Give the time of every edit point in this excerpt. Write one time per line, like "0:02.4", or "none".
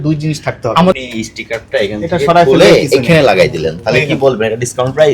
0:00.9